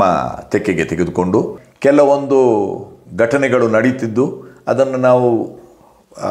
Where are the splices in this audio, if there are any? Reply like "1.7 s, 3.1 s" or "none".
1.6 s